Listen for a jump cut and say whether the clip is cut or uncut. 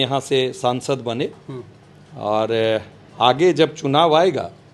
uncut